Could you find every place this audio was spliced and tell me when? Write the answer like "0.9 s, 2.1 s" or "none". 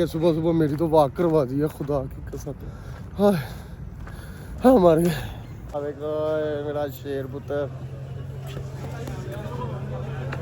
5.7 s